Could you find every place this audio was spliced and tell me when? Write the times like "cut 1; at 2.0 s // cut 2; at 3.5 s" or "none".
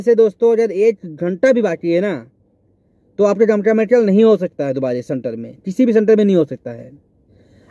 none